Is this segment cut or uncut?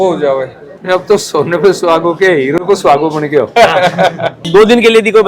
cut